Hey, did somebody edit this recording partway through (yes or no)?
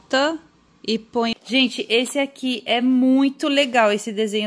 yes